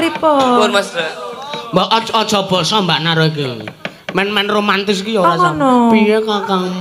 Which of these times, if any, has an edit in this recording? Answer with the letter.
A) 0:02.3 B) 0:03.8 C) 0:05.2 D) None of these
D